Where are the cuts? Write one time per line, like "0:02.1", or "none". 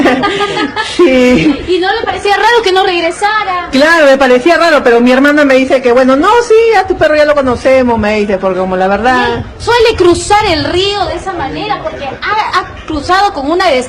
none